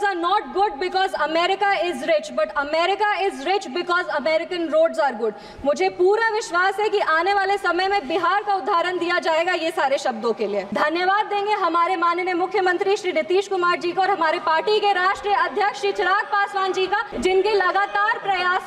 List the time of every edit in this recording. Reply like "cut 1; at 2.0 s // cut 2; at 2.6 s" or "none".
cut 1; at 10.7 s // cut 2; at 17.1 s